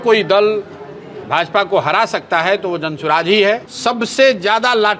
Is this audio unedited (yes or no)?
no